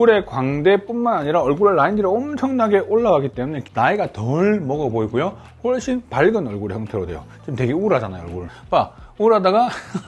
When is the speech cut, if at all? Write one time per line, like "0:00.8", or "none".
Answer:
0:03.6
0:08.5